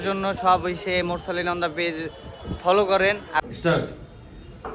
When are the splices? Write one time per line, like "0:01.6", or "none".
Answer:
0:03.4